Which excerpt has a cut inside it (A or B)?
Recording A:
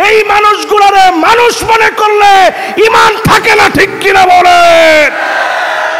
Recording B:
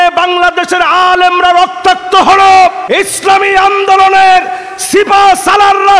B